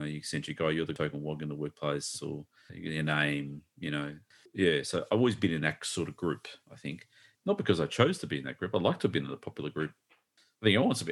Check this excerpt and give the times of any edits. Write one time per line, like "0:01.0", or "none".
0:00.9
0:04.4